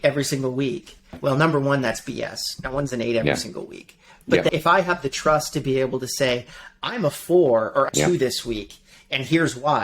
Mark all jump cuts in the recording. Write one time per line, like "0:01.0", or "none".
0:01.1
0:04.5
0:07.9